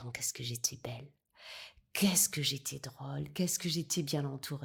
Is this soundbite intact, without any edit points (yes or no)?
yes